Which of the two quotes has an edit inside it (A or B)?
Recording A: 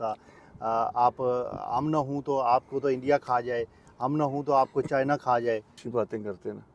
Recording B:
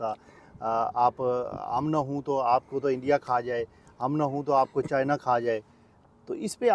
A